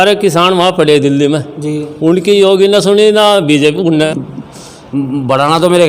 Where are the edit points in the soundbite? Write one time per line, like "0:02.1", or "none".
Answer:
0:04.1

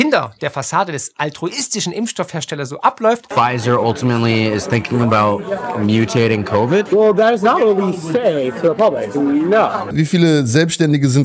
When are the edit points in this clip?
0:03.3
0:06.9
0:09.9

